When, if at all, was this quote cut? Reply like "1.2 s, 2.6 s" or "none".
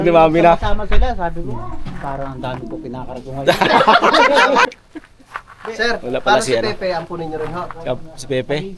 4.7 s